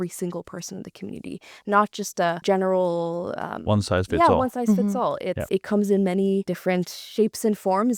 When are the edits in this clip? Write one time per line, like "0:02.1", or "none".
0:02.4
0:05.5